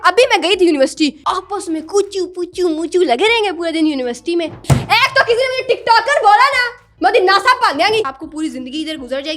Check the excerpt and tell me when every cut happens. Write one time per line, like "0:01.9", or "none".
0:01.2
0:04.6
0:08.1

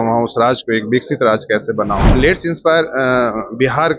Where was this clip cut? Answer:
0:02.1

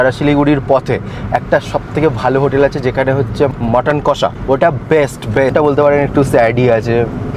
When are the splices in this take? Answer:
0:03.5
0:04.4
0:05.5

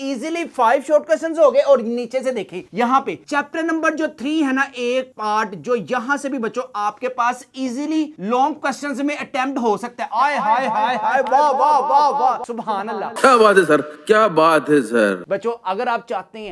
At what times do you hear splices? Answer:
none

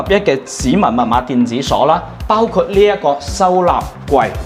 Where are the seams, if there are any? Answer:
none

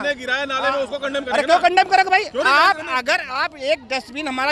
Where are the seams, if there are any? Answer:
none

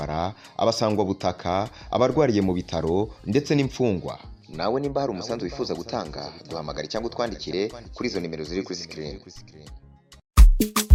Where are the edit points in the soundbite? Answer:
none

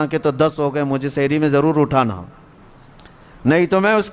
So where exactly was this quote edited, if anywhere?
none

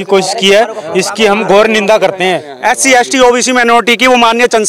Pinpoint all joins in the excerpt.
0:02.5

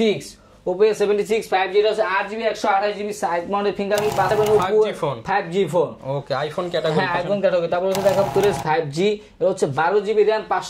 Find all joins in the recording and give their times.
0:04.3
0:08.3

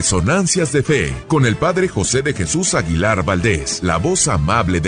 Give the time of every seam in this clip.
0:01.2
0:03.7

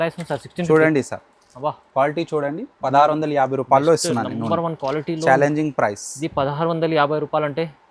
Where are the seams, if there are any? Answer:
none

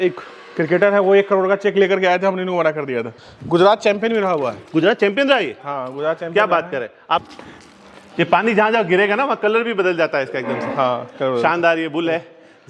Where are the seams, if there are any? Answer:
0:03.1
0:07.0

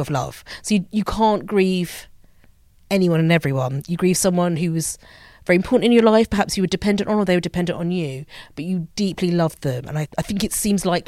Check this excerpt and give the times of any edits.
0:10.0

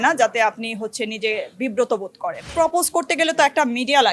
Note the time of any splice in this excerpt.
0:02.4

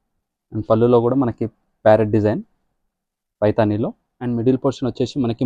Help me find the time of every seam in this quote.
0:04.1

